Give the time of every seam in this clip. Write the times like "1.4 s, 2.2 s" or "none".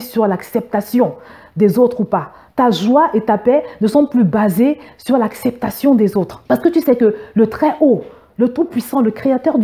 6.4 s